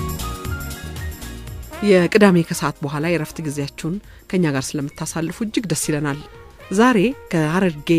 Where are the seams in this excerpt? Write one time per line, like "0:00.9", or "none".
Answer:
0:01.8